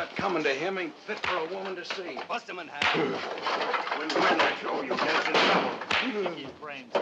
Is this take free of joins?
no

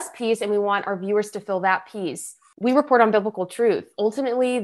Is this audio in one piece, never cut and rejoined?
no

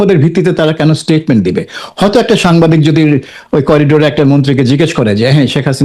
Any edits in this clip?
no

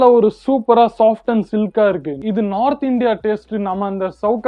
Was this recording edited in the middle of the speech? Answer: yes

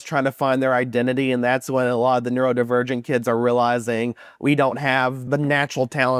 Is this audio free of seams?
no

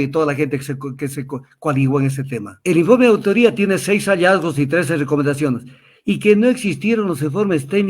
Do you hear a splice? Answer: yes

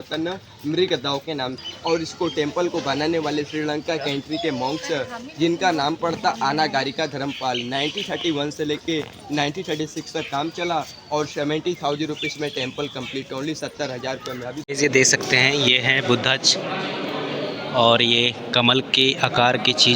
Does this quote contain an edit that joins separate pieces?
yes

